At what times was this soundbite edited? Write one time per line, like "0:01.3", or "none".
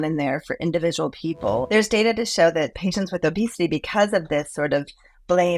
0:01.7